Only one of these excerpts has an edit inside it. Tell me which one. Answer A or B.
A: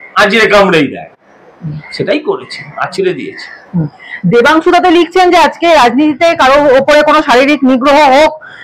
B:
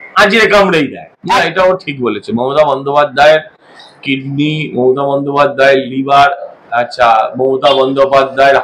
B